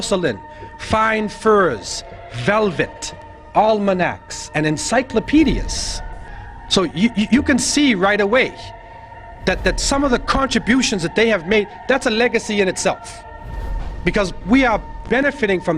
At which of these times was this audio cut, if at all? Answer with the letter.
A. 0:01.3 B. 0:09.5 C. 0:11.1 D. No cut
C